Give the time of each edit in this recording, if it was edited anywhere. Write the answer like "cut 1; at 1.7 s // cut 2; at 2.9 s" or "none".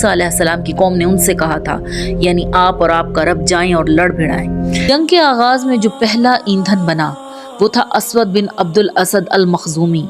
cut 1; at 4.8 s